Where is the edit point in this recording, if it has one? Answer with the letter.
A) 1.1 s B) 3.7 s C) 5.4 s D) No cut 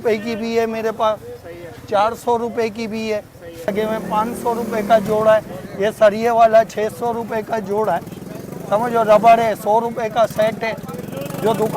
B